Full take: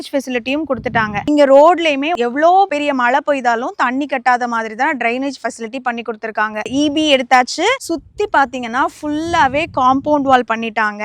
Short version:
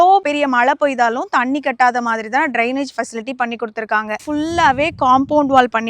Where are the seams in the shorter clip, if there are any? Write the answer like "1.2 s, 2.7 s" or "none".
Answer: 4.2 s